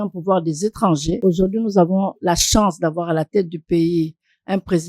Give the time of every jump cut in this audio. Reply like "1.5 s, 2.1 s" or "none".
1.2 s